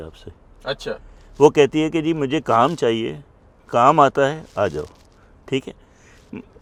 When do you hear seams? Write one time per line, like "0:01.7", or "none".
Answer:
none